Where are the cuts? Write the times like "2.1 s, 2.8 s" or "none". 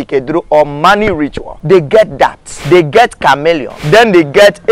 1.5 s, 2.5 s, 3.7 s